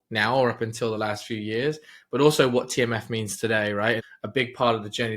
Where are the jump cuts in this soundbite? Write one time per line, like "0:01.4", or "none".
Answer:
0:04.1